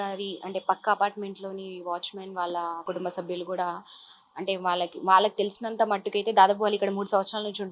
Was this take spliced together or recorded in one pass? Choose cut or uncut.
cut